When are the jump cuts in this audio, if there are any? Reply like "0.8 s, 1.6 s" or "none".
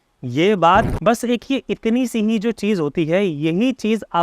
0.9 s